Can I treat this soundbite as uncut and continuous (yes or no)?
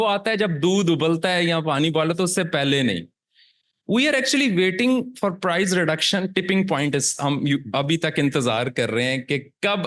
yes